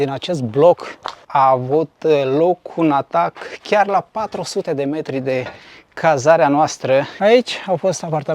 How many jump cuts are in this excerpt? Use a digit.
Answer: 2